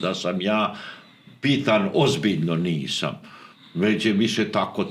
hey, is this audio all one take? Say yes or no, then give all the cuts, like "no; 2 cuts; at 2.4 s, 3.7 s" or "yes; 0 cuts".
yes; 0 cuts